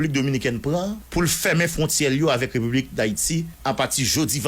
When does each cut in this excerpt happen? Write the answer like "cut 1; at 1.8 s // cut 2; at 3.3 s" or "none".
cut 1; at 1.0 s // cut 2; at 3.5 s